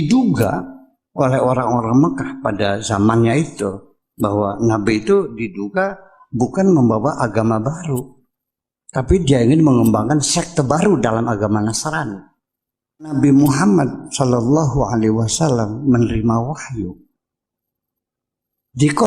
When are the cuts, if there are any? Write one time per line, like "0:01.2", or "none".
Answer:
0:13.1

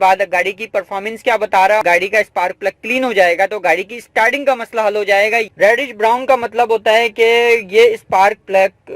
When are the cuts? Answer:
0:01.8
0:05.5

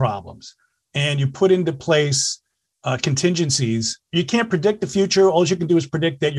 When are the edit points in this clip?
0:04.0

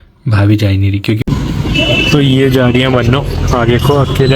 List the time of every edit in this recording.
0:01.2

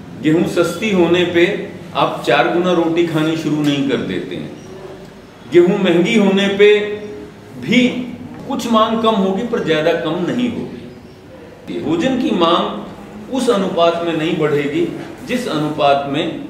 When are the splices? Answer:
0:08.4
0:11.8

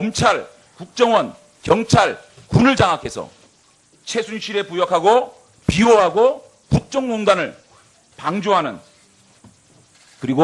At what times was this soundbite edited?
0:05.3

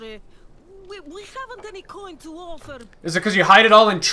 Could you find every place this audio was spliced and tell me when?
none

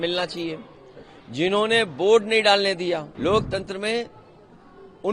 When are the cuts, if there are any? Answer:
0:03.1

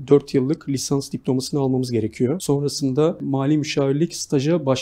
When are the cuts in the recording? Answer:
0:02.4
0:03.2

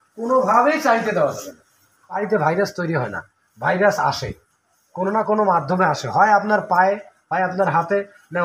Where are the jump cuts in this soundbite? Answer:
0:02.2

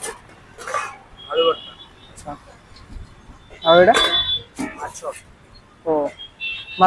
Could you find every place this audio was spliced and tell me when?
none

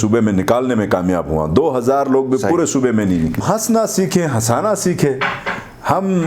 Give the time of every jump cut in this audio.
0:03.4

